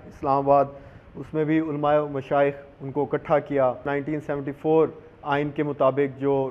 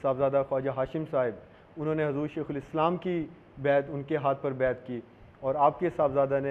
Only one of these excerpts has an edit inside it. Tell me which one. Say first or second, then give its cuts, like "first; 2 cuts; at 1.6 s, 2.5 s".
first; 1 cut; at 3.9 s